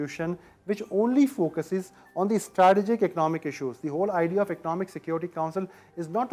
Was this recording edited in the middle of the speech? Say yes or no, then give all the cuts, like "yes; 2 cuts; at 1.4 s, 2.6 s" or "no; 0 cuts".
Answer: no; 0 cuts